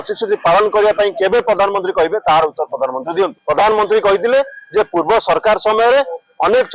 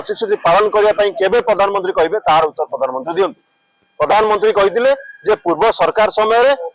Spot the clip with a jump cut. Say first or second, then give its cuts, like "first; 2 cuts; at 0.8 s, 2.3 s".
first; 1 cut; at 3.4 s